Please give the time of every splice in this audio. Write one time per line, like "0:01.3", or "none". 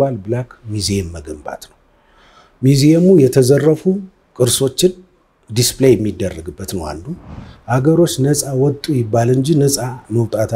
0:07.5